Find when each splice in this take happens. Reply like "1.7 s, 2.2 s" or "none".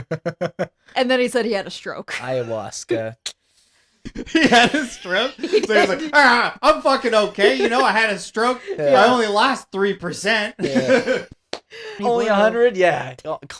12.0 s